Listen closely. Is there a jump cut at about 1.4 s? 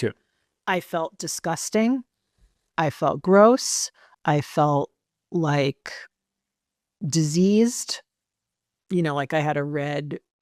no; 0 cuts

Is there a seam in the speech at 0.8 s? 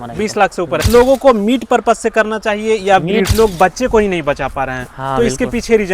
yes; 2 cuts; at 0.8 s, 3.2 s

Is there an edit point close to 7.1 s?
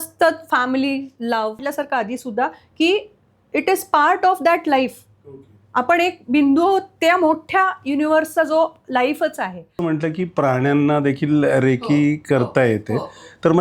no; 2 cuts; at 1.7 s, 9.8 s

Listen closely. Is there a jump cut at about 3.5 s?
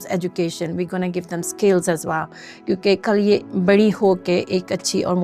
yes; 1 cut; at 3.5 s

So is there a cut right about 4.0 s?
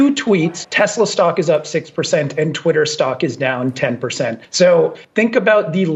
no; 0 cuts

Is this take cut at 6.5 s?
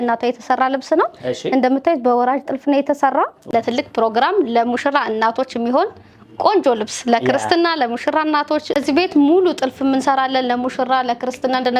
no; 2 cuts; at 3.4 s, 8.7 s

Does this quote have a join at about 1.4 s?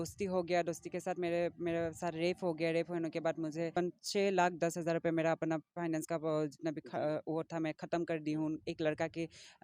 no; 1 cut; at 3.7 s

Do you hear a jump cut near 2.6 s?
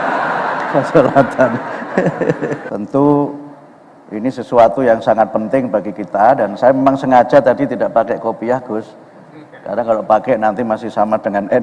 yes; 1 cut; at 2.6 s

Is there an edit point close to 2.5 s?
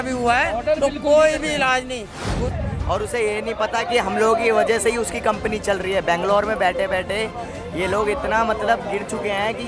yes; 1 cut; at 2.5 s

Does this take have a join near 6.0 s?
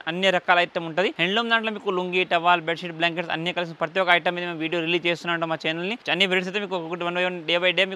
yes; 2 cuts; at 1.2 s, 6.0 s

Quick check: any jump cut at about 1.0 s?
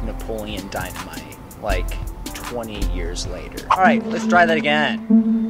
no; 1 cut; at 3.8 s

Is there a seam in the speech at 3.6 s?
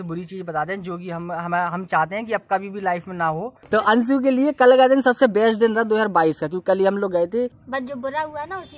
yes; 2 cuts; at 3.6 s, 7.5 s

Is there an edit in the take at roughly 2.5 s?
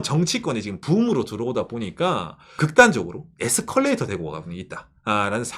yes; 1 cut; at 2.5 s

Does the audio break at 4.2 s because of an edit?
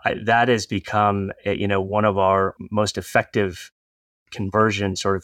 no; 1 cut; at 2.5 s

